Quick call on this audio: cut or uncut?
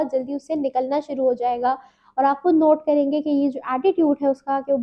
uncut